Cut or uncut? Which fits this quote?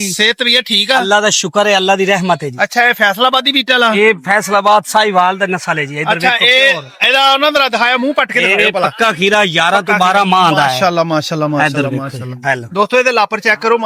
uncut